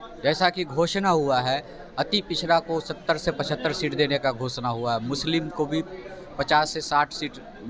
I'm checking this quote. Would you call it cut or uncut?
uncut